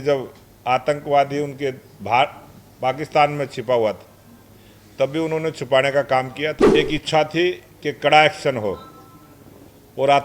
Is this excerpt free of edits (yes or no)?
no